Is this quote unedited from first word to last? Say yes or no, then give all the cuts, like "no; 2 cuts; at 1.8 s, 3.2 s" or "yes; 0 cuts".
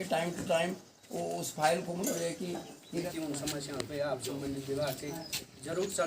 no; 1 cut; at 3.0 s